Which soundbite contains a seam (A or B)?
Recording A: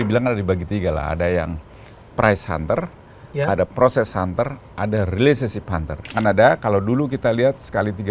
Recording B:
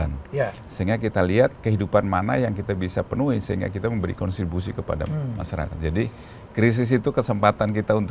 A